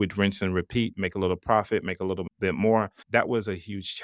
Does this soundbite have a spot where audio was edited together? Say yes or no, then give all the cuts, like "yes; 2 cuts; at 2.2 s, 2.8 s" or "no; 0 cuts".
yes; 1 cut; at 3.0 s